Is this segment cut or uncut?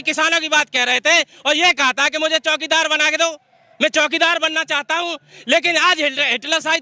uncut